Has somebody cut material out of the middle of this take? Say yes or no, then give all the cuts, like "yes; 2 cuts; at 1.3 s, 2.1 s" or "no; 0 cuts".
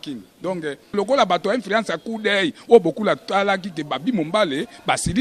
yes; 1 cut; at 0.9 s